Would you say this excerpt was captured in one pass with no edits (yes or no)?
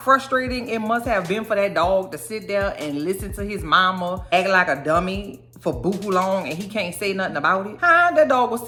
yes